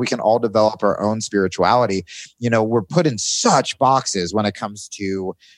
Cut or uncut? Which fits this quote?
uncut